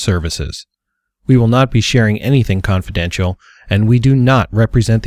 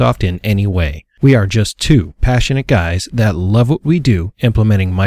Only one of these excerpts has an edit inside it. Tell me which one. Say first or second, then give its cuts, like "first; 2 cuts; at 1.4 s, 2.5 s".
second; 1 cut; at 1.0 s